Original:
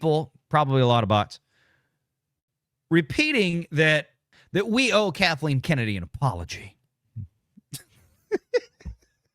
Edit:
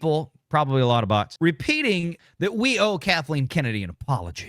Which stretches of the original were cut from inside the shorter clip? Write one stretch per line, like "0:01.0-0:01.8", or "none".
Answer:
0:01.3-0:02.8
0:03.6-0:04.3

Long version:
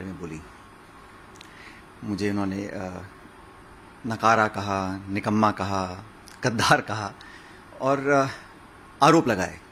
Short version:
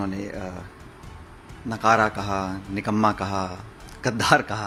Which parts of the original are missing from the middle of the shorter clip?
none

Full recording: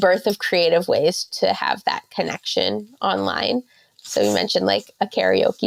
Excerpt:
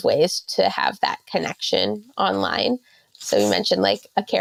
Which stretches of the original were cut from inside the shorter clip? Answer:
none

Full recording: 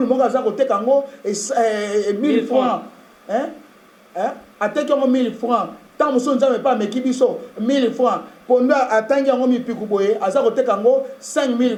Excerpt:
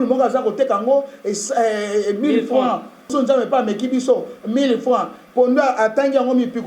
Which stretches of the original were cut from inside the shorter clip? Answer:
0:03.1-0:06.2

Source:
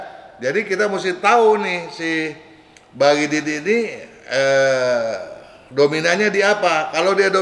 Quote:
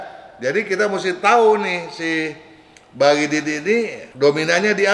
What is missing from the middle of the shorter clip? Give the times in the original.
0:04.0-0:05.6

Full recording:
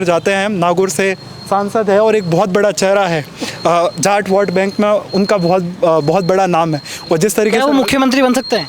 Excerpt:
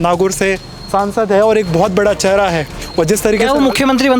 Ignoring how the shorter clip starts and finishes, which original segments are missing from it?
0:03.3-0:06.9

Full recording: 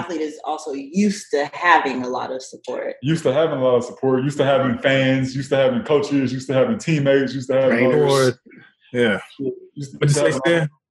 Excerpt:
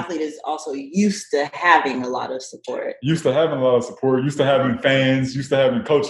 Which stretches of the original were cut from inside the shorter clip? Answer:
none

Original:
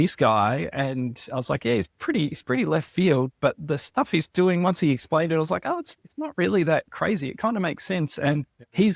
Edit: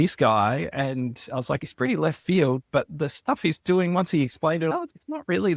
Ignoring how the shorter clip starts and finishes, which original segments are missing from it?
0:01.6-0:02.3
0:05.4-0:05.9

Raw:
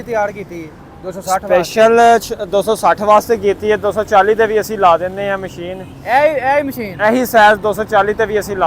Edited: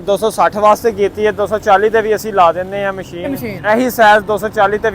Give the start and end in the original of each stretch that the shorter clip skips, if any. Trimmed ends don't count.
0:05.9-0:06.8

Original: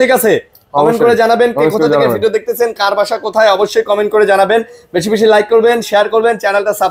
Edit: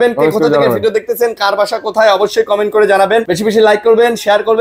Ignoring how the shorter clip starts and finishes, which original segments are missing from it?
0:04.7-0:05.0

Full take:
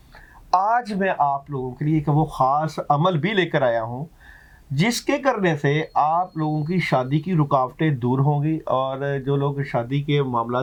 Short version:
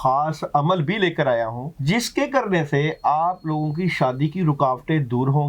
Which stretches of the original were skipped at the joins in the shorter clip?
0:04.0-0:04.6

